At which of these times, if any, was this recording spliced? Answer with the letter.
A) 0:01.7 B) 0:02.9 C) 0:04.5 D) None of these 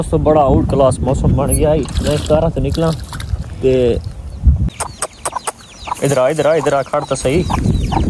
C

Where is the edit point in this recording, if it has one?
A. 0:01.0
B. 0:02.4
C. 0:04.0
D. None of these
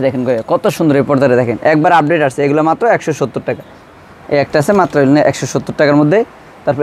D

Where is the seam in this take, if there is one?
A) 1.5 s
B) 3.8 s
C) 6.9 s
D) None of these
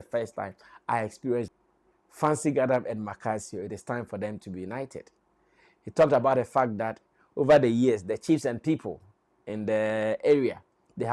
A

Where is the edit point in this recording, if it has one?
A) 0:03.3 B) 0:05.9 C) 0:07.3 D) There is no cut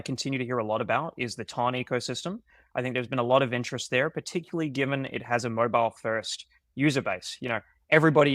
D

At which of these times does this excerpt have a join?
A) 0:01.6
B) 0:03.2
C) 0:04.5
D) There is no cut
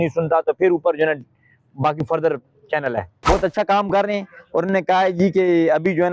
B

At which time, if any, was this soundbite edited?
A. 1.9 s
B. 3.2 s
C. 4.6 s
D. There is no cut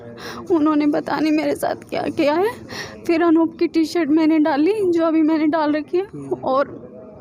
D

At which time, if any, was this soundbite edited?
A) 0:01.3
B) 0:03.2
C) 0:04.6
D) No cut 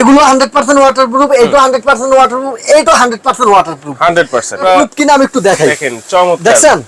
C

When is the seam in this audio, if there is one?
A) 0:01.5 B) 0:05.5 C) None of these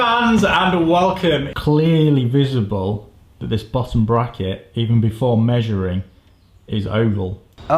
A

